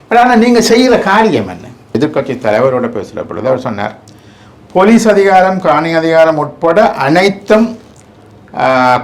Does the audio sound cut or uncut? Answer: cut